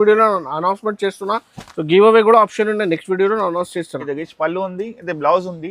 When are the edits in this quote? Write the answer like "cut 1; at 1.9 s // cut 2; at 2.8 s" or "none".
cut 1; at 4.0 s